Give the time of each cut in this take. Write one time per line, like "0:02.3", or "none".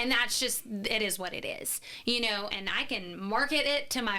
0:02.5